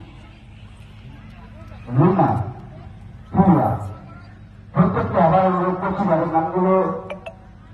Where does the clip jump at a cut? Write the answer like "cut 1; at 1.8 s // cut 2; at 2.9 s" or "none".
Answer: none